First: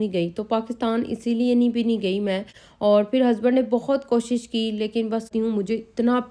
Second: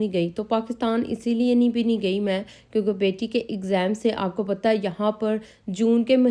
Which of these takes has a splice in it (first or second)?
first